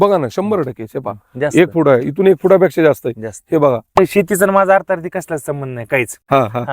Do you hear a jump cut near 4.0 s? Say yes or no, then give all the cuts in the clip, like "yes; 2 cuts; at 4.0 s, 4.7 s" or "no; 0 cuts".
yes; 1 cut; at 4.0 s